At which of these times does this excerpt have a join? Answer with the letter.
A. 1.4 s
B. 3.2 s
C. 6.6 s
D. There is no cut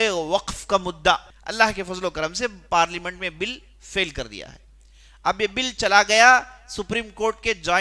A